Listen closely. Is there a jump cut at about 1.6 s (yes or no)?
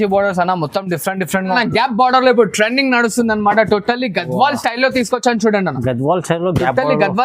yes